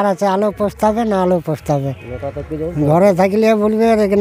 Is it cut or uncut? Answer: uncut